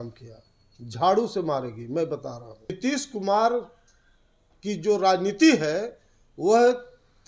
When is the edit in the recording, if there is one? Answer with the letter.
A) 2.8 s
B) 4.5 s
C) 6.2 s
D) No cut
A